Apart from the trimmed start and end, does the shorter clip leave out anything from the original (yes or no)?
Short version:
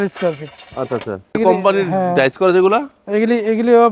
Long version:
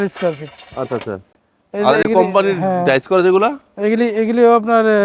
yes